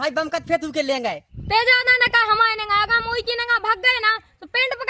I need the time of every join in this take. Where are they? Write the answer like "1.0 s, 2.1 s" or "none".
none